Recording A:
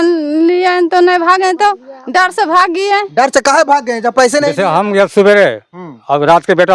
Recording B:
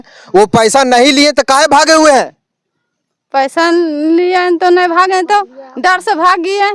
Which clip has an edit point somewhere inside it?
A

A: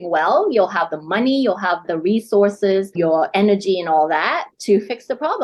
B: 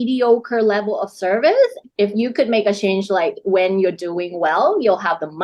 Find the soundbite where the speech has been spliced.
B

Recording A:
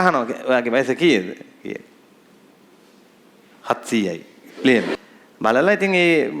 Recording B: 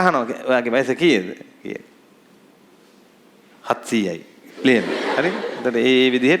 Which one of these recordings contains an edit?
A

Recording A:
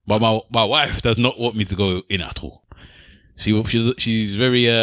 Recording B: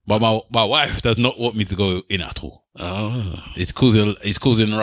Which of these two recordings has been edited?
A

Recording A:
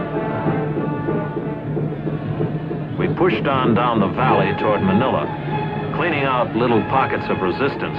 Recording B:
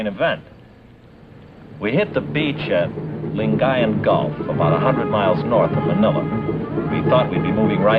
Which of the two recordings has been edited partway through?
B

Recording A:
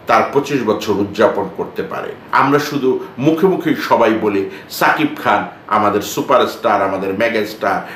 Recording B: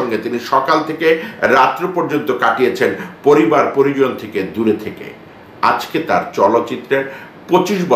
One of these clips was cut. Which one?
A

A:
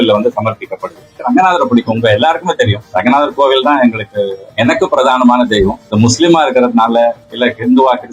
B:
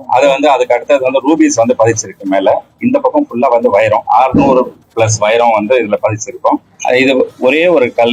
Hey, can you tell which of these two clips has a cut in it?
A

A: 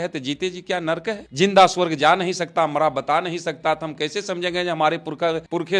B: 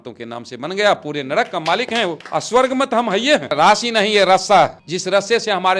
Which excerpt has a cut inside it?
B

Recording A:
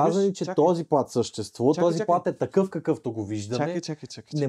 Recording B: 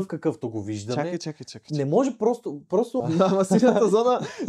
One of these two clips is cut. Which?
B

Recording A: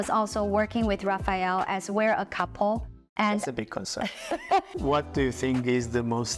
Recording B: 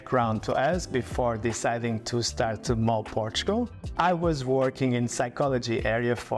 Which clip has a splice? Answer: A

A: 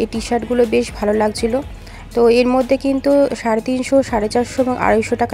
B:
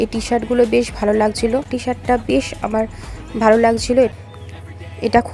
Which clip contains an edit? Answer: B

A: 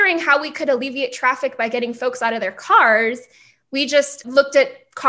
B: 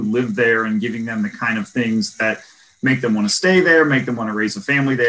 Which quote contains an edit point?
A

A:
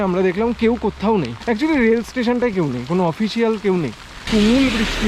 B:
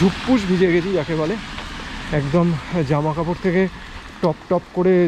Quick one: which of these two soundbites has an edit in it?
A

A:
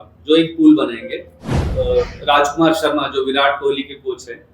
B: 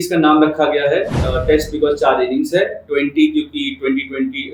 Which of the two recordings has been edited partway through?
A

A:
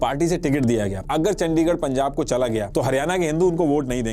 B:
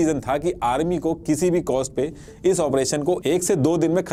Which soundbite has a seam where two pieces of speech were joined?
A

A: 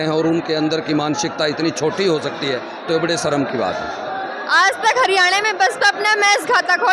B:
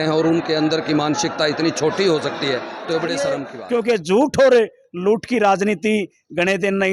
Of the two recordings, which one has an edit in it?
B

